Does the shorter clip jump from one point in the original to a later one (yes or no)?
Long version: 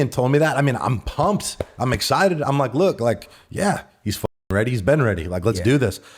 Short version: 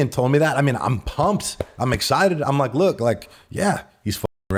no